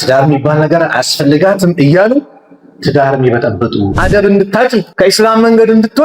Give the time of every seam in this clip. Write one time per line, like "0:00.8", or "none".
0:03.9
0:04.9